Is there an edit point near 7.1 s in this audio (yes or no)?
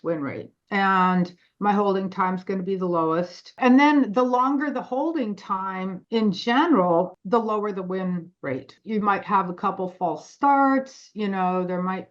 yes